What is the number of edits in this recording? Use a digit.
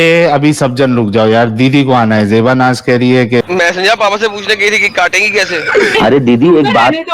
2